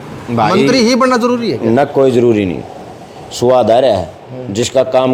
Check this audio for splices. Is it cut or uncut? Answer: uncut